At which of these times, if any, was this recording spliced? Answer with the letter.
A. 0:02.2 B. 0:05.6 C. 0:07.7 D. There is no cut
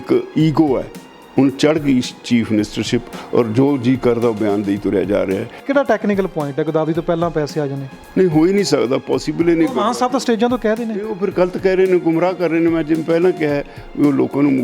B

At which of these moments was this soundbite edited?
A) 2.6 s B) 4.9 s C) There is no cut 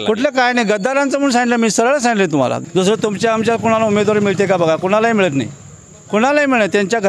A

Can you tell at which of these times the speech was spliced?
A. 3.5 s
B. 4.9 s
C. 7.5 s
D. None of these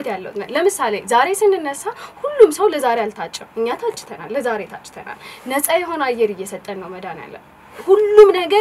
D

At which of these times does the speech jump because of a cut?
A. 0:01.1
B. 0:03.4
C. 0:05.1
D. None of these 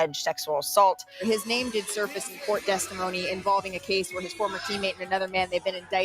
A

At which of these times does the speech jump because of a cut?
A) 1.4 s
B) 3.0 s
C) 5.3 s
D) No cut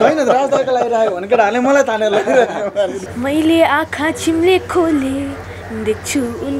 B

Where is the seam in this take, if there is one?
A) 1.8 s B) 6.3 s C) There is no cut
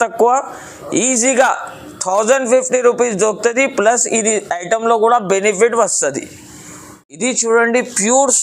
C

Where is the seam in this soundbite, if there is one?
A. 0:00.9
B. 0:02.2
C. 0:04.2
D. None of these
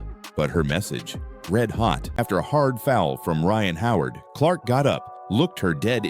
B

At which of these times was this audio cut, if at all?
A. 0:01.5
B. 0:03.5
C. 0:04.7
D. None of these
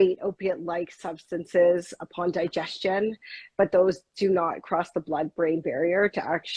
D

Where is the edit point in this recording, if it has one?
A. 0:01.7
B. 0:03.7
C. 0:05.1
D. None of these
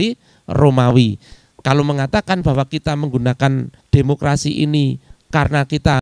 B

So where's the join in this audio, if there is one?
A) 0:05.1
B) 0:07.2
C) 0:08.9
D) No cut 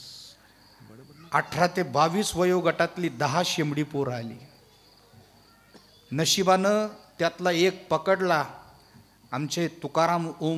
D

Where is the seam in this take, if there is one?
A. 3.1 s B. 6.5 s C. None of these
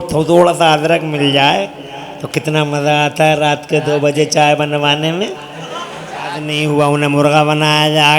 B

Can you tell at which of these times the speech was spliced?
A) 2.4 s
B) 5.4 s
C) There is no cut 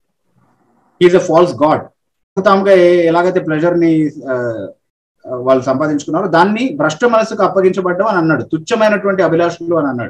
A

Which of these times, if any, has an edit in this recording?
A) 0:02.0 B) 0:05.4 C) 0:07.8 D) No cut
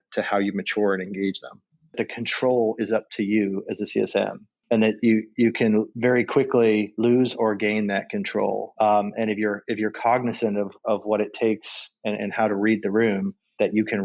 A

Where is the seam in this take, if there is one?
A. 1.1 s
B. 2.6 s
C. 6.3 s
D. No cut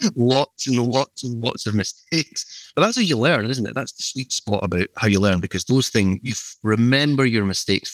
C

